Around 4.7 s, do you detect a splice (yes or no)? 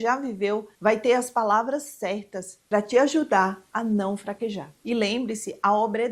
yes